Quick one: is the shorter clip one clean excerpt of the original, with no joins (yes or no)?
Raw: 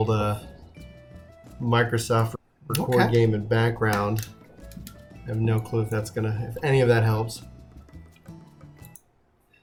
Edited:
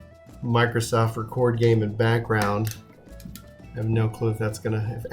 no